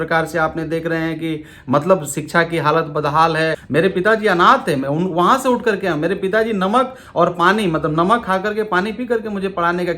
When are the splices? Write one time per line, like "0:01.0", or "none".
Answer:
0:03.6